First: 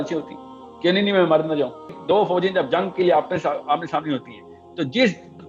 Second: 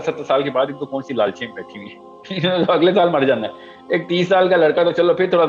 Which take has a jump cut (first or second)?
first